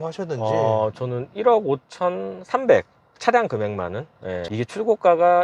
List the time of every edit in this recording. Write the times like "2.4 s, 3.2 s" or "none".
4.3 s